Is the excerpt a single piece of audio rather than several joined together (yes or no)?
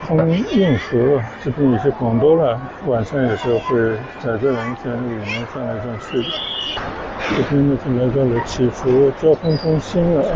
no